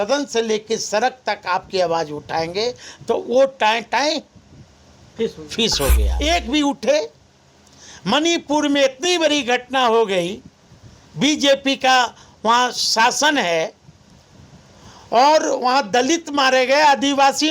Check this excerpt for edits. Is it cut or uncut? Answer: cut